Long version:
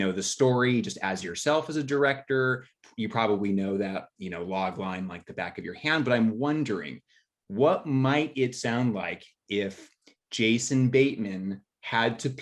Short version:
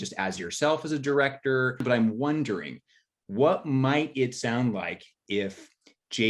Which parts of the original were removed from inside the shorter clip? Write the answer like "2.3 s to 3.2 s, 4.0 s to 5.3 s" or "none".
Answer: 2.7 s to 6.0 s

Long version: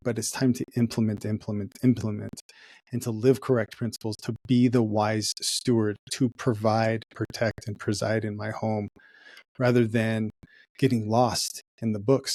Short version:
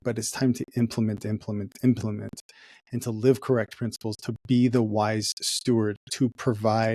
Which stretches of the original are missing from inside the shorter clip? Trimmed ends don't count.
none

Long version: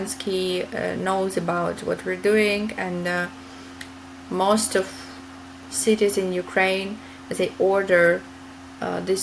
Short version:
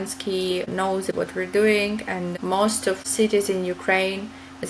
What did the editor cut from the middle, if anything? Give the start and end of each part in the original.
1.0 s to 1.7 s, 3.1 s to 4.2 s, 4.9 s to 5.7 s

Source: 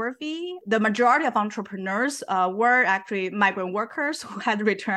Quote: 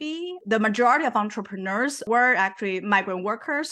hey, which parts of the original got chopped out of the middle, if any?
2.2 s to 2.5 s

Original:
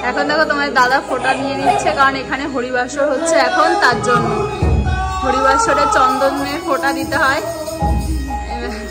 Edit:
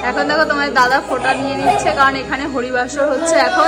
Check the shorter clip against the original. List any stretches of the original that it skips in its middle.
none

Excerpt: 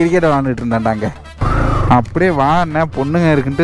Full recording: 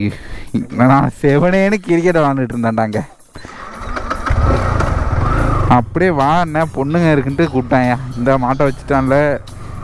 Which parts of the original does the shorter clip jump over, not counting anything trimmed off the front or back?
3.3 s to 5.1 s

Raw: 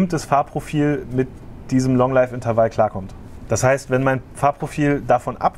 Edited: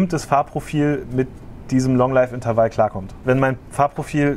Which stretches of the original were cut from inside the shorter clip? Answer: 3.2 s to 3.8 s

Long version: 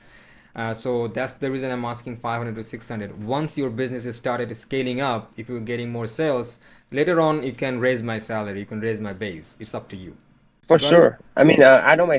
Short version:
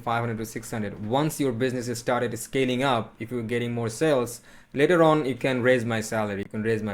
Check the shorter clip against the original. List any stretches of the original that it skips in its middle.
none

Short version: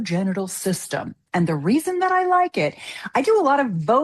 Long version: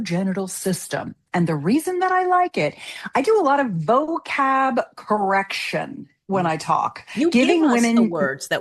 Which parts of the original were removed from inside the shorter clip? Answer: none

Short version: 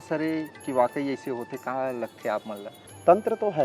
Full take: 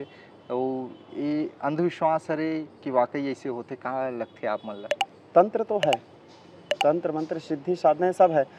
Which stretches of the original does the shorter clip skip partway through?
4.9 s to 5.0 s

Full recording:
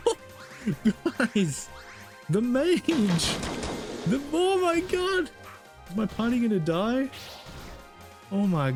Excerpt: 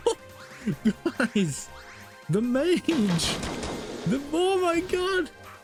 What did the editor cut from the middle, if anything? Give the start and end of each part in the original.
none

